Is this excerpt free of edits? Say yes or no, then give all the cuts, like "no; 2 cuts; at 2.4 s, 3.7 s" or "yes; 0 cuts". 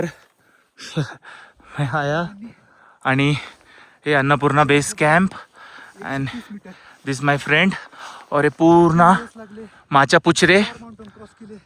yes; 0 cuts